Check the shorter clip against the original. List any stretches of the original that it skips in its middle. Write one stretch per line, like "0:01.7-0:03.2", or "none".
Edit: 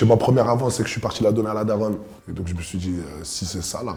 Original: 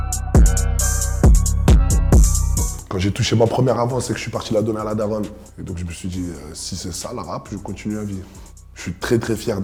none